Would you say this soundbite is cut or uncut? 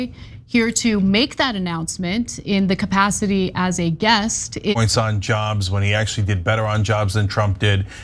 cut